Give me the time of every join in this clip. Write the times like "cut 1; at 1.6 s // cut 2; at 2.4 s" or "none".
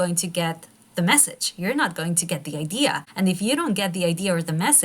cut 1; at 3.0 s